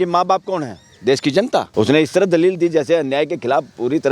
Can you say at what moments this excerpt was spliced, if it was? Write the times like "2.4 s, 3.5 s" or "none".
1.7 s